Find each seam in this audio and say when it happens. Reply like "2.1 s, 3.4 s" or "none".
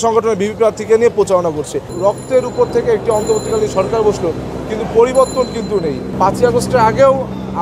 1.8 s, 6.1 s

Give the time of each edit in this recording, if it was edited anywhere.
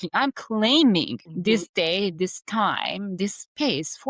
1.2 s

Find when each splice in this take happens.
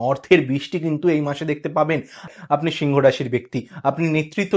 2.3 s

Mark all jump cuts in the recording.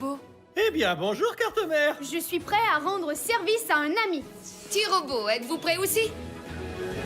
6.2 s

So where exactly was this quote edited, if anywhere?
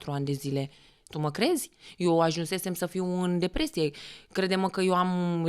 none

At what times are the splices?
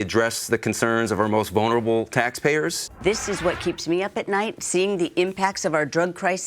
2.9 s

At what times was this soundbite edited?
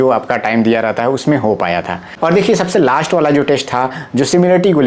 2.0 s

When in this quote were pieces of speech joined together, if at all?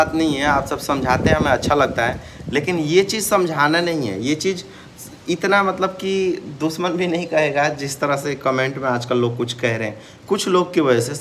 none

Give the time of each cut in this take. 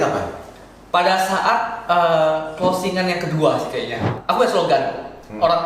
4.1 s

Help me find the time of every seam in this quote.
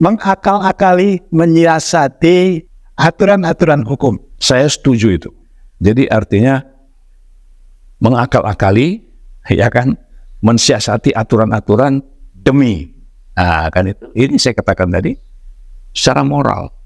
2.7 s, 4.3 s

